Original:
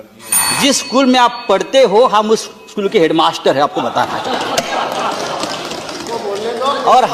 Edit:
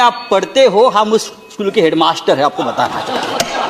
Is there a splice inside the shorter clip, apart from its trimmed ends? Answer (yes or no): no